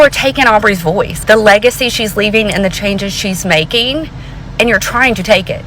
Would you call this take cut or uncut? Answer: cut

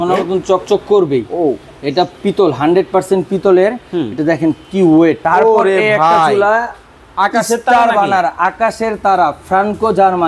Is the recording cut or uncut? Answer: cut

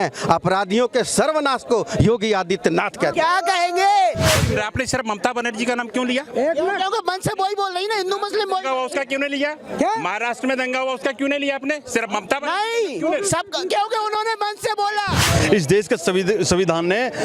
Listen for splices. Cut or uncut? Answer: cut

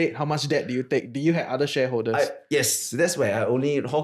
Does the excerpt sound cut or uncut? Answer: uncut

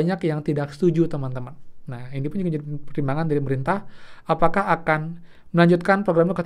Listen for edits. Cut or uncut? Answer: uncut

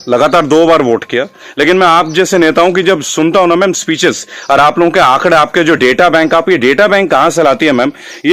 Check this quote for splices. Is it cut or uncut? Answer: uncut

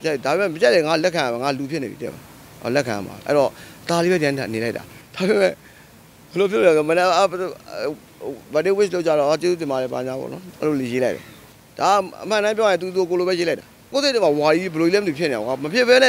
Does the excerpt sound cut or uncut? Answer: cut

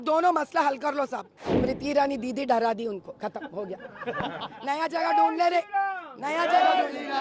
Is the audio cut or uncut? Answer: cut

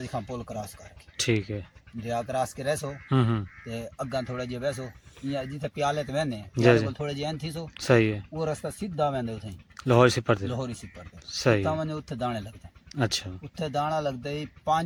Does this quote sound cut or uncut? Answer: uncut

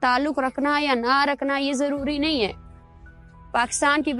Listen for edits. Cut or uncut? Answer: uncut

